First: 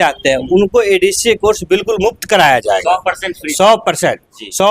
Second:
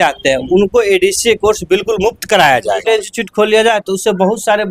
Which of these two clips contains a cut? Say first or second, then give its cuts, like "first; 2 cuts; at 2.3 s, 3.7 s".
second; 1 cut; at 2.8 s